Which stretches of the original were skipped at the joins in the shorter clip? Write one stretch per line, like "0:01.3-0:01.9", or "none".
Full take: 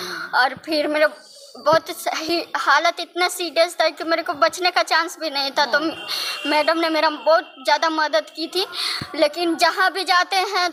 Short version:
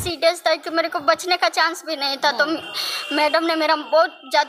none